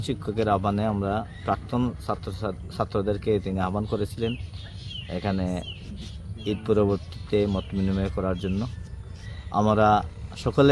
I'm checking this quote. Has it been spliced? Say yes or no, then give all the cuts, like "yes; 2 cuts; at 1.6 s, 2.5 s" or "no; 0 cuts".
no; 0 cuts